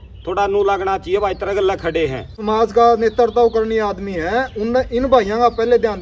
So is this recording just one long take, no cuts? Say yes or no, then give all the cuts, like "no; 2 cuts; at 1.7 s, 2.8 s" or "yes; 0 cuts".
no; 1 cut; at 2.4 s